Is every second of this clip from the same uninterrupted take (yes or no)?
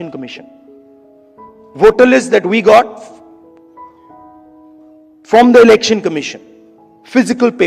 no